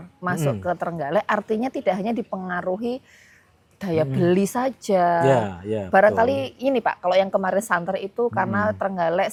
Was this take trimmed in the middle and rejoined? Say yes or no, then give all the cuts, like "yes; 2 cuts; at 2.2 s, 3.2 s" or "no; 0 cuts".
no; 0 cuts